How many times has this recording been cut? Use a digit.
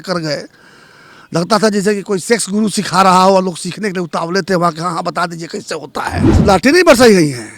1